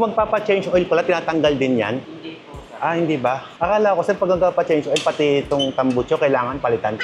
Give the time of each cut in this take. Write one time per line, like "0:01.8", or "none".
none